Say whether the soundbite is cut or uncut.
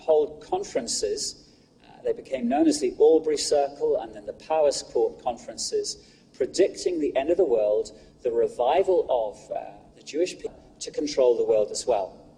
uncut